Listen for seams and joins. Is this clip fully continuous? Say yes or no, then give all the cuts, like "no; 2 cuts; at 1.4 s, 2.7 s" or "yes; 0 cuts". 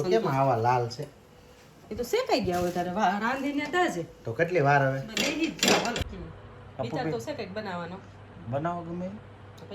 no; 1 cut; at 6.1 s